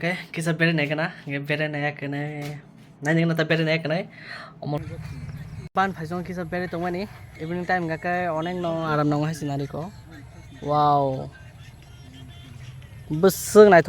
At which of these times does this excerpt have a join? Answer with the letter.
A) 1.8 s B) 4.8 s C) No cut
B